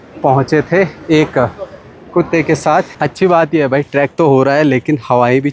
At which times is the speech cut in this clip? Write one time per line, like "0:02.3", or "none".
0:03.0

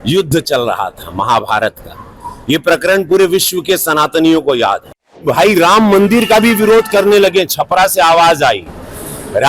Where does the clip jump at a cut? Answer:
0:05.2

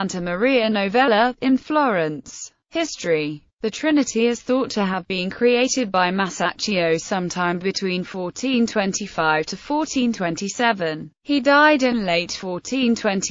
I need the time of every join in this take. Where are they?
none

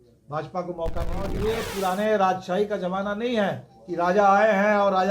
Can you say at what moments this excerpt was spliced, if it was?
0:01.4

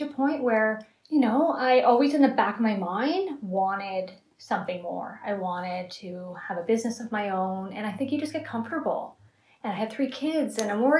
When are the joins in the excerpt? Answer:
0:00.9

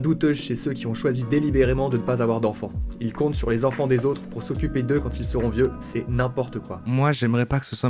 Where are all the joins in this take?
0:06.8

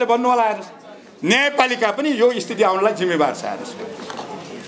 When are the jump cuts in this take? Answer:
none

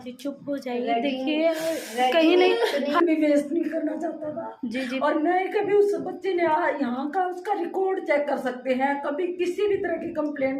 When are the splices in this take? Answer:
0:03.0

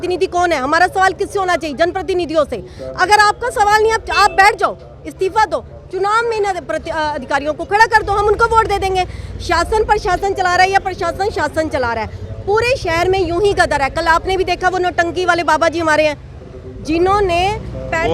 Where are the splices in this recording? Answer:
none

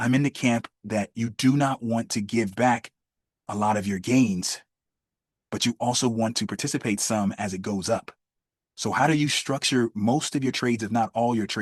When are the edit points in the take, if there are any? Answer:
none

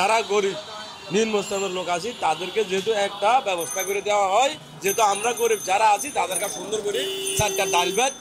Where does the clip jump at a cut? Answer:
none

